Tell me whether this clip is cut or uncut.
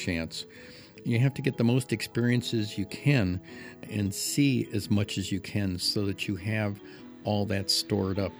cut